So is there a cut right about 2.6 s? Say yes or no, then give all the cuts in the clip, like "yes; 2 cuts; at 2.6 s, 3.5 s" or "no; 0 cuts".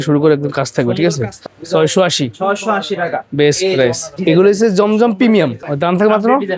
no; 3 cuts; at 1.4 s, 4.1 s, 5.6 s